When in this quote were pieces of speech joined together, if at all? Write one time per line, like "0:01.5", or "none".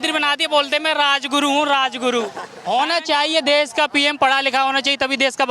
0:02.5